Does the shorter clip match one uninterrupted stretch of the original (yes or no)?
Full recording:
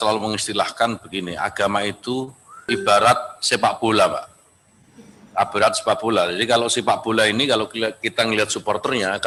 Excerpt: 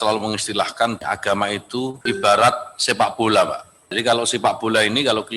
no